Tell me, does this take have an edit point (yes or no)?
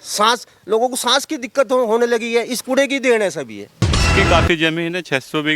yes